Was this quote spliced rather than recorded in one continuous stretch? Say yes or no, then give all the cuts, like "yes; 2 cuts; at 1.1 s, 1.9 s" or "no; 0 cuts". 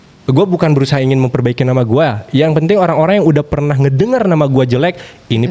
no; 0 cuts